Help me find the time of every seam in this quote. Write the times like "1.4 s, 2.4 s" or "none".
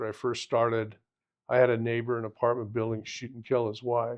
none